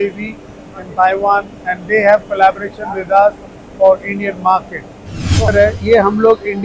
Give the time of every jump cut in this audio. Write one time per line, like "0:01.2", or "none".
0:05.5